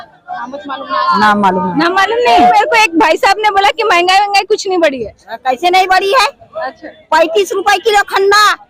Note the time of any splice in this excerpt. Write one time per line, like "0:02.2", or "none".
0:02.3